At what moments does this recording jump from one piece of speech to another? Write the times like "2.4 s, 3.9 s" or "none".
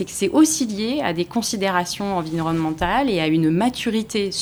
none